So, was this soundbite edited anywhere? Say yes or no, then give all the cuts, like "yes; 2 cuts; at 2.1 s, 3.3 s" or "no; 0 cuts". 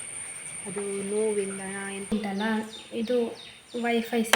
yes; 1 cut; at 2.1 s